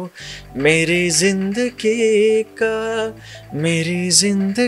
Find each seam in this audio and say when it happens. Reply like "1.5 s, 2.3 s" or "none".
none